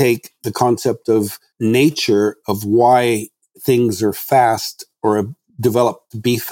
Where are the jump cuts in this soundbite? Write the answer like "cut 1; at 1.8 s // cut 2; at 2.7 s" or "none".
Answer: cut 1; at 1.4 s